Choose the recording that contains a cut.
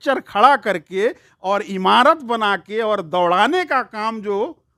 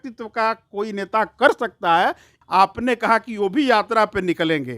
second; 1 cut; at 2.3 s

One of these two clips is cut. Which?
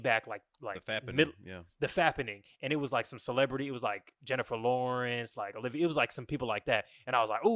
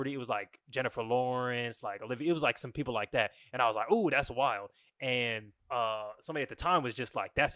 second; 1 cut; at 5.5 s

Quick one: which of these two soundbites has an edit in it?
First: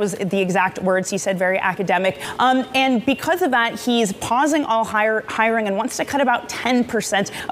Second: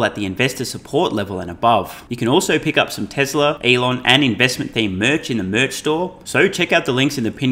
second; 3 cuts; at 2.0 s, 3.6 s, 6.2 s

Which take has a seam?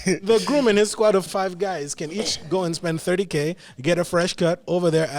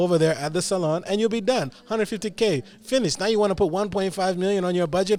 first; 1 cut; at 1.3 s

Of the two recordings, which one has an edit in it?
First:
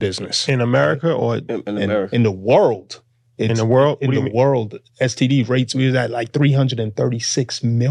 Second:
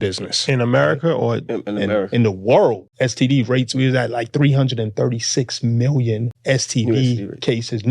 second; 2 cuts; at 2.9 s, 6.3 s

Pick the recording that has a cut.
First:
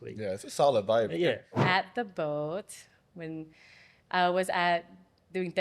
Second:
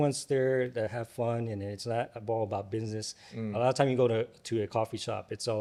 first; 1 cut; at 1.5 s

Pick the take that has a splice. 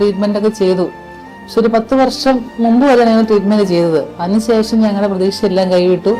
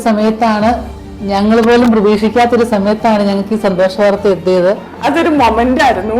second; 1 cut; at 4.9 s

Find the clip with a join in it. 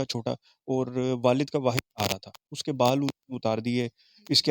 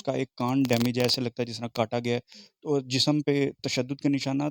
first; 1 cut; at 2.6 s

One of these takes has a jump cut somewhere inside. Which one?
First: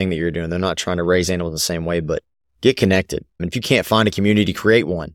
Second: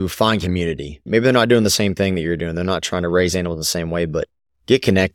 second; 1 cut; at 1.1 s

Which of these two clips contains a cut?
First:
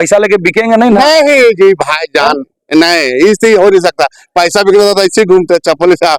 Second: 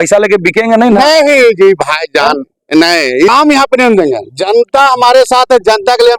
second; 1 cut; at 3.3 s

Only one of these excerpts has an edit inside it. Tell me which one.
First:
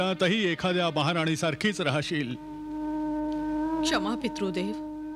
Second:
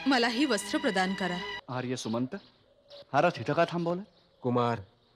second; 1 cut; at 1.5 s

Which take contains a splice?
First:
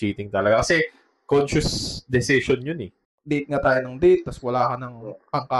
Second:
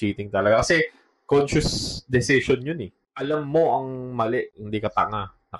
first; 1 cut; at 3.1 s

